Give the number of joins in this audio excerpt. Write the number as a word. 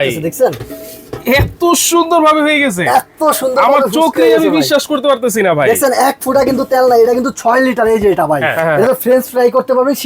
one